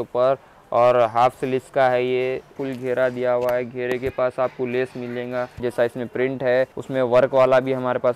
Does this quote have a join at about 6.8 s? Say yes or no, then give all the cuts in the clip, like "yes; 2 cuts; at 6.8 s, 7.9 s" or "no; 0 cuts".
yes; 3 cuts; at 2.6 s, 5.6 s, 6.8 s